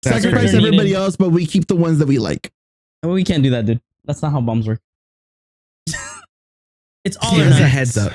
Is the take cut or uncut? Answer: uncut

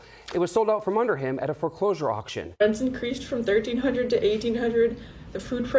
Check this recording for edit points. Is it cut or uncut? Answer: cut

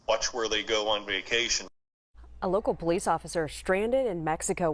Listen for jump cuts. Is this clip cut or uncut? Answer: uncut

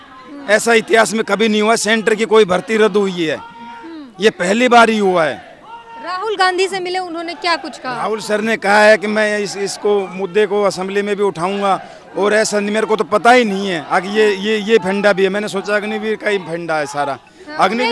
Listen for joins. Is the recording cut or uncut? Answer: uncut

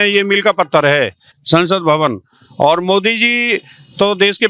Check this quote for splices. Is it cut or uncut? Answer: uncut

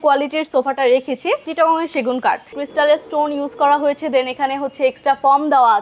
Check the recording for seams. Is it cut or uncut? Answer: cut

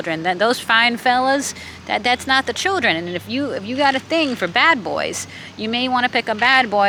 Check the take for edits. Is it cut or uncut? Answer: uncut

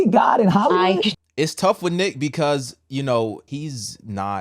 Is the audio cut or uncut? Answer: cut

